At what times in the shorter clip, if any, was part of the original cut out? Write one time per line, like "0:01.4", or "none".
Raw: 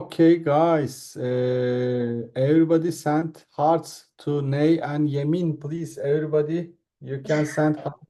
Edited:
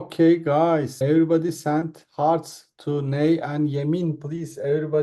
0:00.9